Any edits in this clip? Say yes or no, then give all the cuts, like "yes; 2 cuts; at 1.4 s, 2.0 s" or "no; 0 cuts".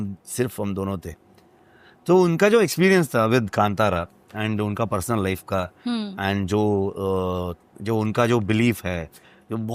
no; 0 cuts